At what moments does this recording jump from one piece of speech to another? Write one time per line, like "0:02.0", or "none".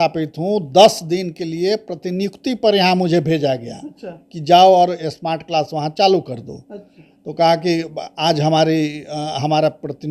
none